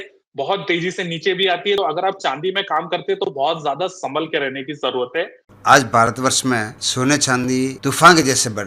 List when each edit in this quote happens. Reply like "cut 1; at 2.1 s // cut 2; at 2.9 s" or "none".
cut 1; at 1.8 s // cut 2; at 5.4 s // cut 3; at 6.8 s // cut 4; at 7.8 s